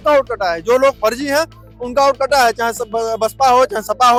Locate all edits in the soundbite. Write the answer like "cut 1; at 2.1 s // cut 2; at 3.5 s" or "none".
none